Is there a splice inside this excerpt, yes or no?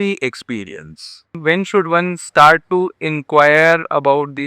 yes